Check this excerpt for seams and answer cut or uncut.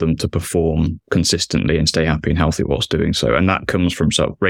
uncut